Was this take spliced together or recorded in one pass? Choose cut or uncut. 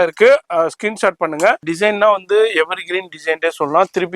cut